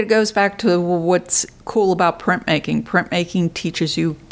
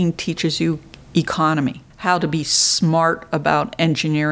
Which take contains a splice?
second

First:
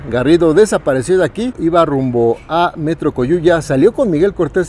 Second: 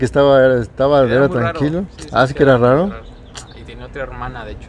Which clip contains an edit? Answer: first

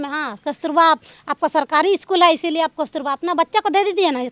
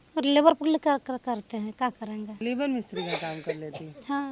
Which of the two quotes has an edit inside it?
second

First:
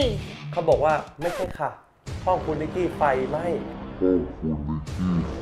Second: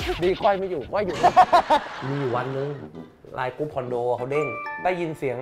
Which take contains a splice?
second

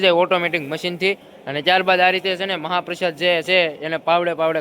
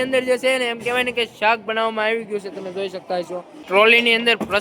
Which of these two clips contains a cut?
second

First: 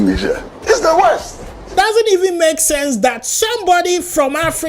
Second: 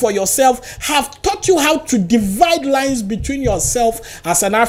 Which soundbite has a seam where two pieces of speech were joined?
first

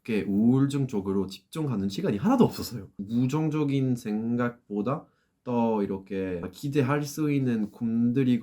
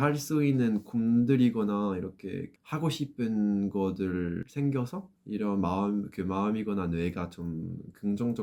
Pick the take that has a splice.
first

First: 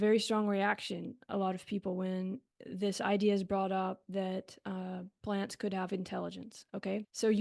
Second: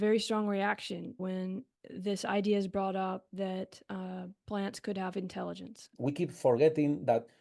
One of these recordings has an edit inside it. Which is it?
second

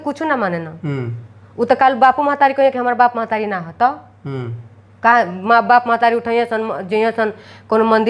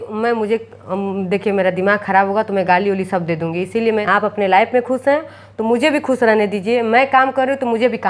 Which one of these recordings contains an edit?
second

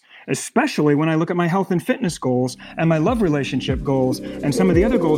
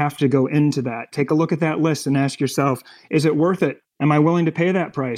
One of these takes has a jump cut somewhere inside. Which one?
second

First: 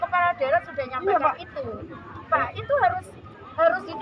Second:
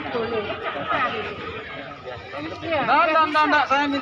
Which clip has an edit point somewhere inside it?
second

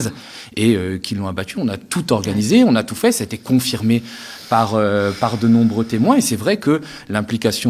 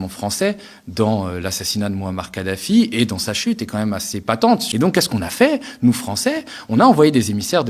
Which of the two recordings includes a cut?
second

